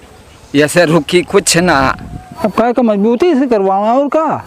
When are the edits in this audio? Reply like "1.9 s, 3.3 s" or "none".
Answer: 2.4 s